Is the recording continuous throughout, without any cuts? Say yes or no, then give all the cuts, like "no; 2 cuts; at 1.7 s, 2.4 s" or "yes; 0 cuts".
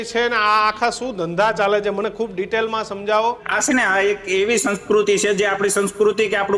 no; 1 cut; at 3.5 s